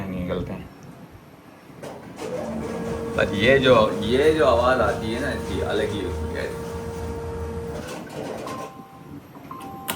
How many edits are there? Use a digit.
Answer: 1